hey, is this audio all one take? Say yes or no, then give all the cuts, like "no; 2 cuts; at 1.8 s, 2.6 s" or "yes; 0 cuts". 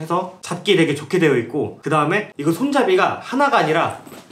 yes; 0 cuts